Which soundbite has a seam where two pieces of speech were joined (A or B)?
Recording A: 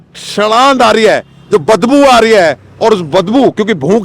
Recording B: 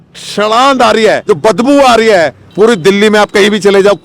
B